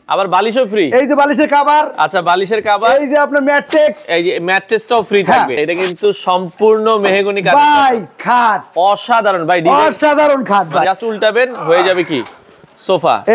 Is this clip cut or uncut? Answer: cut